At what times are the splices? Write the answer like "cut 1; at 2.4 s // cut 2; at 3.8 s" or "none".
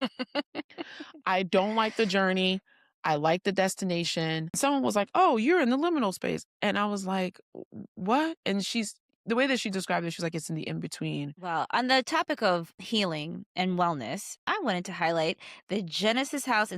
cut 1; at 4.6 s // cut 2; at 11.4 s // cut 3; at 12.8 s // cut 4; at 14.3 s